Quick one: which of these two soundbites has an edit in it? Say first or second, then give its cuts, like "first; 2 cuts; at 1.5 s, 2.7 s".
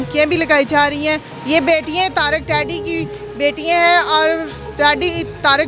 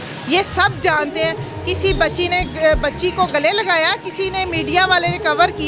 first; 1 cut; at 1.3 s